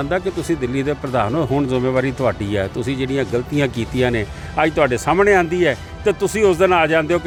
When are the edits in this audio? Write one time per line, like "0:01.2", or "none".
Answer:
none